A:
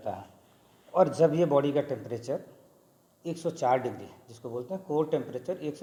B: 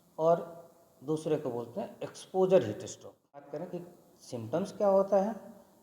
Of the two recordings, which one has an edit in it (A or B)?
B